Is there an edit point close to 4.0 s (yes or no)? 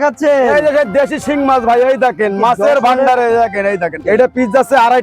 yes